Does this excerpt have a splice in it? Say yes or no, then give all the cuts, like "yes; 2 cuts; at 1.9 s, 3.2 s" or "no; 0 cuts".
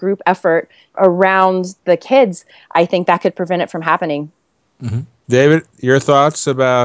no; 0 cuts